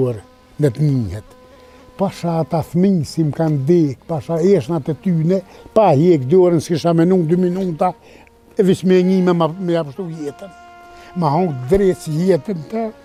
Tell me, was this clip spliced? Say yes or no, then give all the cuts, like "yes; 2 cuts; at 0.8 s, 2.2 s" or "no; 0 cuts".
no; 0 cuts